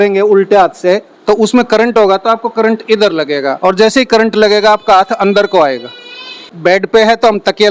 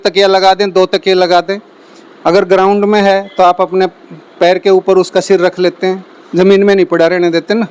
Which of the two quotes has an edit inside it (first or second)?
first